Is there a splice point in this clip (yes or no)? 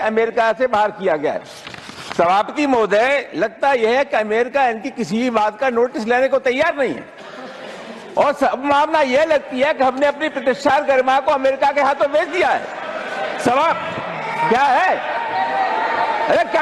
no